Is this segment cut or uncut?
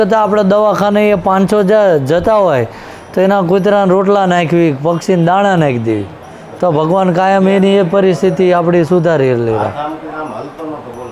uncut